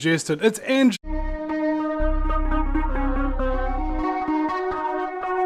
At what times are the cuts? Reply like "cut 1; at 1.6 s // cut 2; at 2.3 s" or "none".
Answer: none